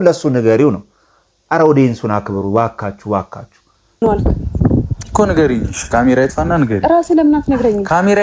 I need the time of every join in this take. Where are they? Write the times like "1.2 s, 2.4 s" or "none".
4.0 s